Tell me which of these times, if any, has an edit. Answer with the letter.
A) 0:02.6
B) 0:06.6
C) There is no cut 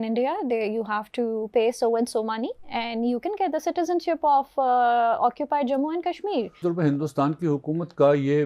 B